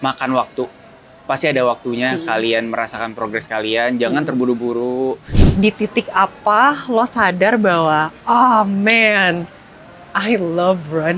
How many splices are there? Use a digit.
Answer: 1